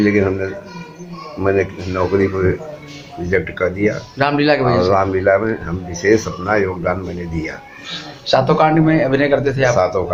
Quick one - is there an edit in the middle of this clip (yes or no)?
no